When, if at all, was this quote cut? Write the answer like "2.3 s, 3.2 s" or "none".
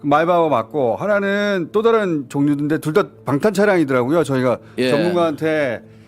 none

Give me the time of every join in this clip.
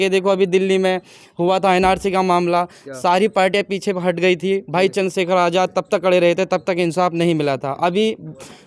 none

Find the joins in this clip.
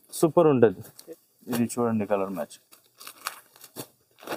0.9 s

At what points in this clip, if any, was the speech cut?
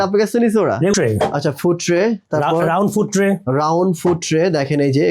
0.9 s

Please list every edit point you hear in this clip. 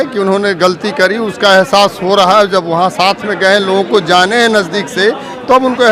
none

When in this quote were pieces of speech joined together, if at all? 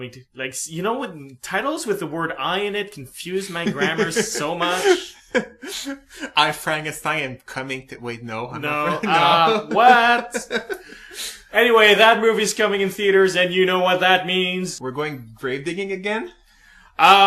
none

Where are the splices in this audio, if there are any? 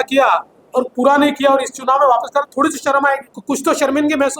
3.3 s

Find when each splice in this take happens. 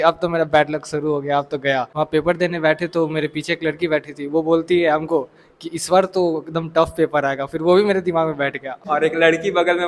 1.9 s, 8.7 s

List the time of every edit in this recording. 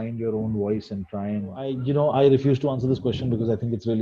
1.8 s

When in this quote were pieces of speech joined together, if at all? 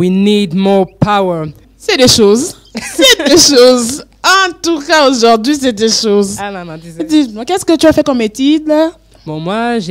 1.7 s

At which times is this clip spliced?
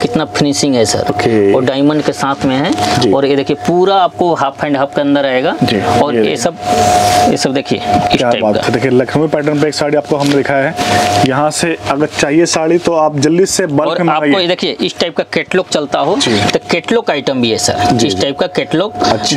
none

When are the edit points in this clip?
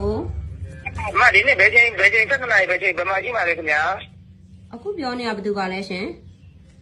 none

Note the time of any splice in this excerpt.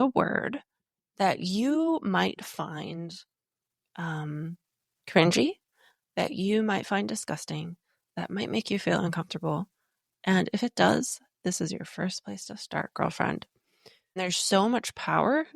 14.1 s

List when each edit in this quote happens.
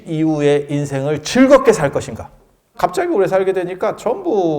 2.7 s

